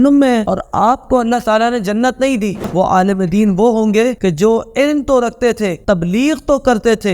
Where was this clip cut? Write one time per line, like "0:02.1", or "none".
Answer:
0:02.7

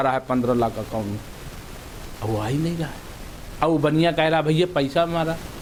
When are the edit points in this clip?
none

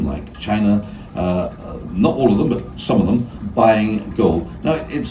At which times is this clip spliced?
0:03.4

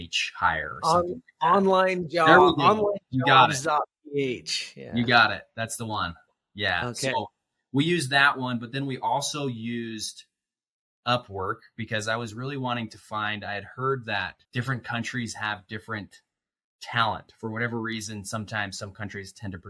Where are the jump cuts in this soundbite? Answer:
none

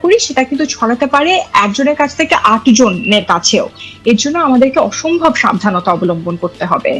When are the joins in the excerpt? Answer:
none

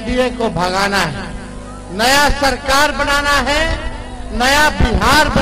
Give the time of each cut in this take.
none

